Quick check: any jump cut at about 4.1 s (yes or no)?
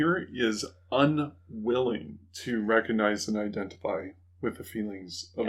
no